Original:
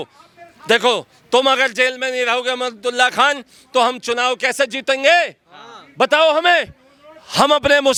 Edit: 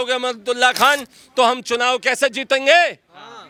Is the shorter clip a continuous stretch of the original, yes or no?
yes